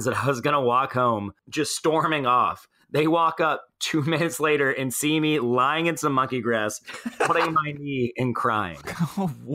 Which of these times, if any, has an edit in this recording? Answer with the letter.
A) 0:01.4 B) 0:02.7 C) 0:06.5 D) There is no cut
A